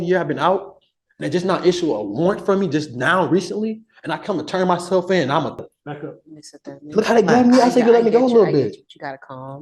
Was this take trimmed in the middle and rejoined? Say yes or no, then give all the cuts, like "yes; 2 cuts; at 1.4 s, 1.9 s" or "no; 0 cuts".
yes; 1 cut; at 5.6 s